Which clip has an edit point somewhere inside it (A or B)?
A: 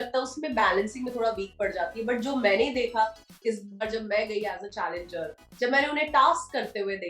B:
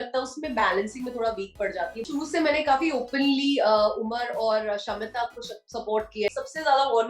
B